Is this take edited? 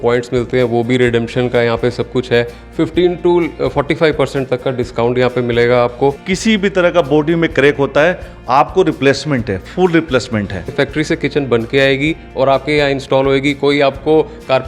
yes; 2 cuts; at 6.3 s, 10.7 s

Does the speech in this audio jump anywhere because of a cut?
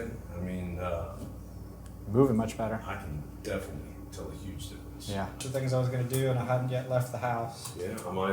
yes; 1 cut; at 5.4 s

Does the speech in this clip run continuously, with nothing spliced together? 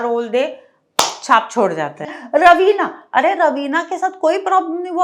no; 1 cut; at 2.0 s

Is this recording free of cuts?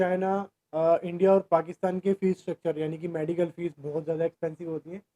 yes; 0 cuts

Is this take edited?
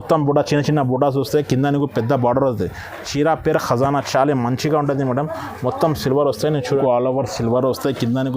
yes; 1 cut; at 6.8 s

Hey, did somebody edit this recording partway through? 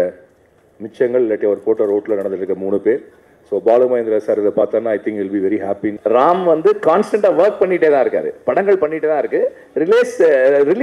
yes; 1 cut; at 5.9 s

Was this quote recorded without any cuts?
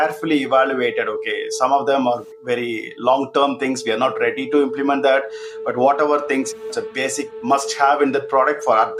yes; 0 cuts

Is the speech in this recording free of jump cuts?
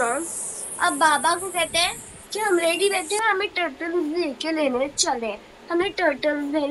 yes; 0 cuts

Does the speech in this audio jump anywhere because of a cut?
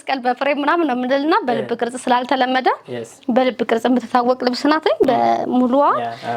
no; 0 cuts

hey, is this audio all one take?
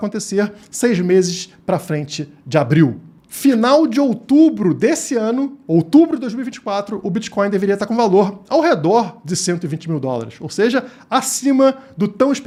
yes; 0 cuts

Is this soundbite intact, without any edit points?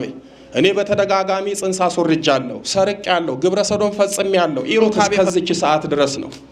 no; 1 cut; at 5.1 s

